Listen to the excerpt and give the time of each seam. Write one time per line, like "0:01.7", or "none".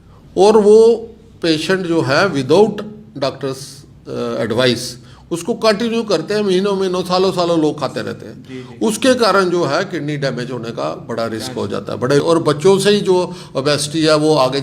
0:12.2